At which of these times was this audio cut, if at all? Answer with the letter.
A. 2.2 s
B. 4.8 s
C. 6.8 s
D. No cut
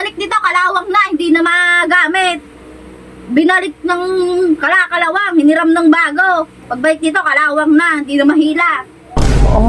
D